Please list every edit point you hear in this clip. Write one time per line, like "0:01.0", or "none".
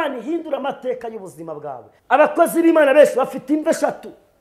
0:01.9